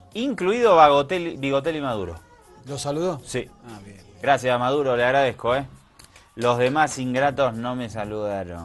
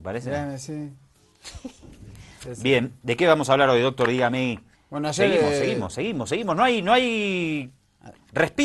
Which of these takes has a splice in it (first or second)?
second